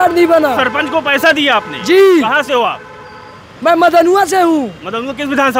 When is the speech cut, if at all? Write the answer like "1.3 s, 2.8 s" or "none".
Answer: none